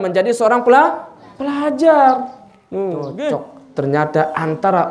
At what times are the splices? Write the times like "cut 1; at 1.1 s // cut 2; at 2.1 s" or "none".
cut 1; at 3.6 s